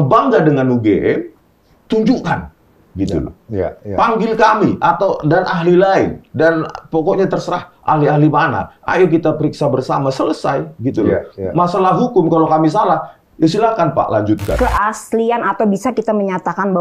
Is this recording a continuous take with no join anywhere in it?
no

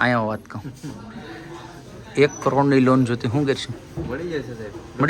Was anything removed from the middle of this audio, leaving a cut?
no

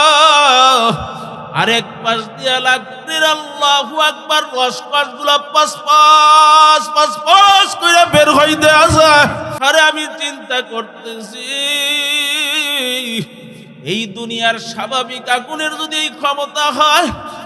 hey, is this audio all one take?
no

